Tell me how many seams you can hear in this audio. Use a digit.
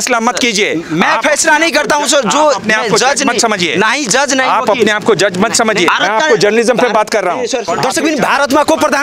2